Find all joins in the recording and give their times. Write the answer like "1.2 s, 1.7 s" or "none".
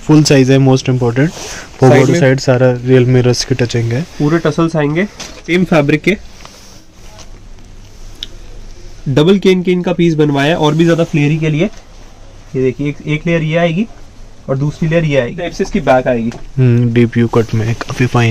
5.5 s, 7.0 s, 15.4 s